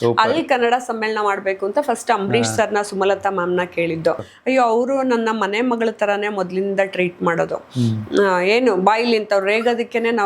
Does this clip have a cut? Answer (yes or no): yes